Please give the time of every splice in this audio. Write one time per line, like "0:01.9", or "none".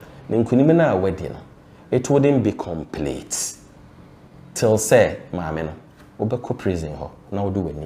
none